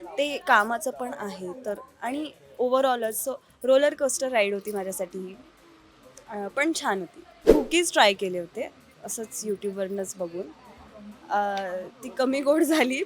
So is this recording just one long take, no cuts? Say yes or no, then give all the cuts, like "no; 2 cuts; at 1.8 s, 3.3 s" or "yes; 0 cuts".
no; 1 cut; at 7.3 s